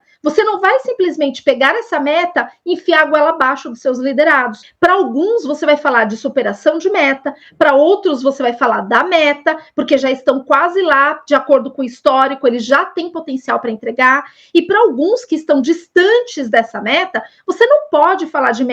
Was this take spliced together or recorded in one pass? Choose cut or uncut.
cut